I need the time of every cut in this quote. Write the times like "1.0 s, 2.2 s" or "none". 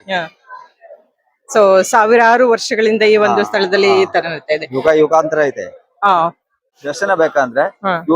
6.8 s

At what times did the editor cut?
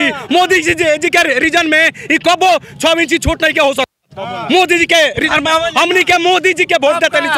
none

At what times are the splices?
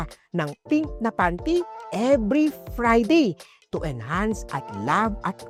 none

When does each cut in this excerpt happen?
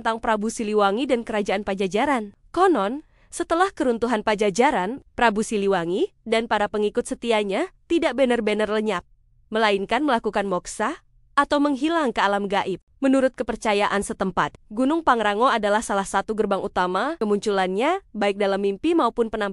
17.1 s

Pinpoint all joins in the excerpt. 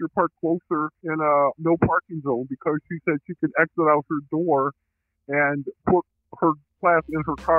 1.0 s, 6.8 s

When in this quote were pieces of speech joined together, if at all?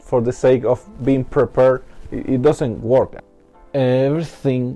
3.2 s

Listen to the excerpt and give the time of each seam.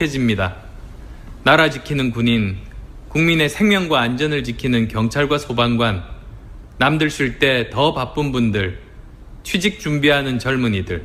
none

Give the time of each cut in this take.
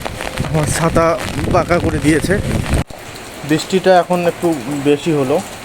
2.8 s

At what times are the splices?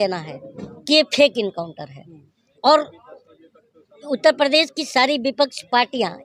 none

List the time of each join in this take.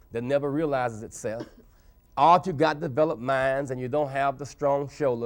none

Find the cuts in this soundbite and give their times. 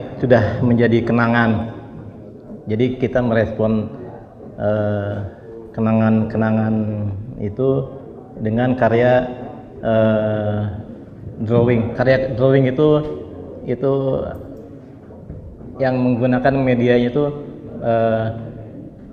none

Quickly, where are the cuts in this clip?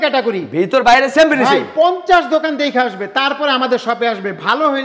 none

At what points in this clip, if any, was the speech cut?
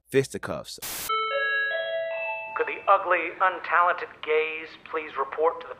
0.9 s

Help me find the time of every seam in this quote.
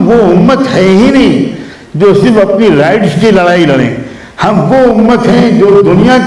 none

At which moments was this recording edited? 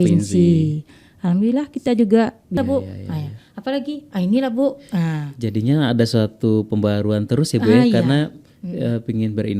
2.6 s

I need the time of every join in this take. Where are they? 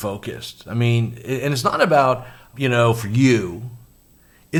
none

